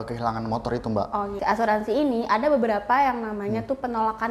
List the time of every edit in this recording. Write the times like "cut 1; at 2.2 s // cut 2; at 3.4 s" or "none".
cut 1; at 1.4 s

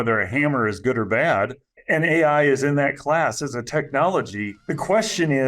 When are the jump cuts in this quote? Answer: cut 1; at 1.7 s // cut 2; at 4.5 s

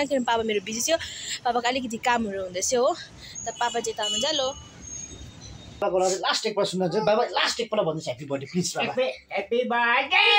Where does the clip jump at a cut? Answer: cut 1; at 5.8 s

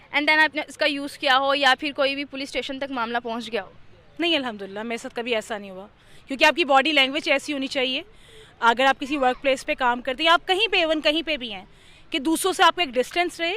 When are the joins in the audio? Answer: none

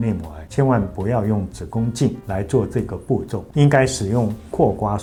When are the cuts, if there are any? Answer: none

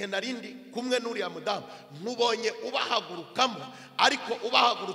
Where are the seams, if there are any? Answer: none

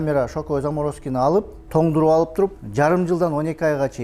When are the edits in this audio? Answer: cut 1; at 1.6 s // cut 2; at 2.6 s

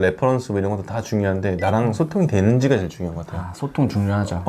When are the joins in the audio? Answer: none

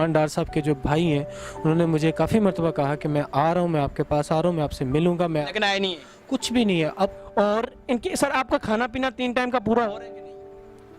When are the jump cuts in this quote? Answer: cut 1; at 7.1 s

